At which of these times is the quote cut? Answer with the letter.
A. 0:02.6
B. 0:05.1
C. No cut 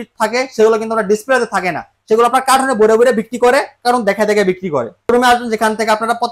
B